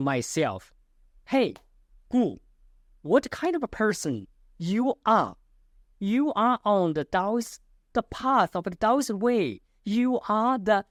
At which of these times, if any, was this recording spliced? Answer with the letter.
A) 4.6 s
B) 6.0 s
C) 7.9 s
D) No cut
D